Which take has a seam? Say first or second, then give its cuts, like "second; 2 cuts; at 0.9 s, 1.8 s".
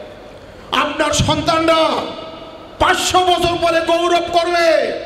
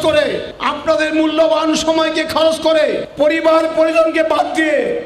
second; 2 cuts; at 0.8 s, 2.8 s